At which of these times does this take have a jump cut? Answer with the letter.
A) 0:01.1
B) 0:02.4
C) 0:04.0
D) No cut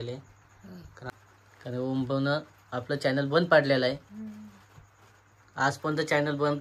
A